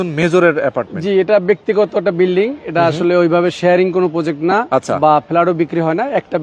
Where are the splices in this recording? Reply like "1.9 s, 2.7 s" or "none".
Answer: none